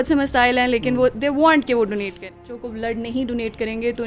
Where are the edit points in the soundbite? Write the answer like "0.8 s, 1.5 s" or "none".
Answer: 2.6 s